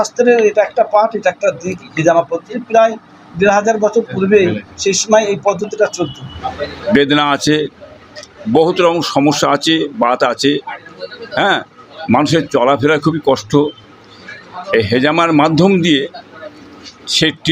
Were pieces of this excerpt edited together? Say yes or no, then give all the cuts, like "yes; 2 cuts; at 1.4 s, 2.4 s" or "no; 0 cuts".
yes; 1 cut; at 6.4 s